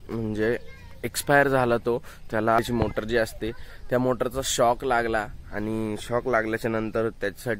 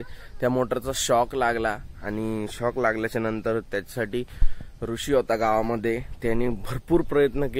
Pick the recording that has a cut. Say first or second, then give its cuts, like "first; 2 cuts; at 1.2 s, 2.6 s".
first; 1 cut; at 2.6 s